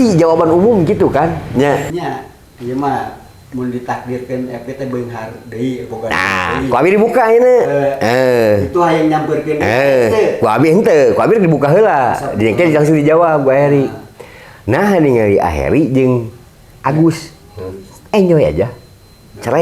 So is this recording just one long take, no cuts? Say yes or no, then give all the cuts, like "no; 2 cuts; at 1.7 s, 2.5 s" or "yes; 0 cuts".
no; 1 cut; at 1.9 s